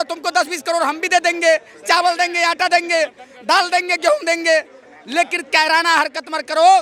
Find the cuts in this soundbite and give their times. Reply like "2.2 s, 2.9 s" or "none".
none